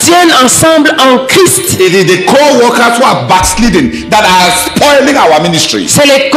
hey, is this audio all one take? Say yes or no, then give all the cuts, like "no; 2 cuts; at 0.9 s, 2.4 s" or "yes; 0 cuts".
yes; 0 cuts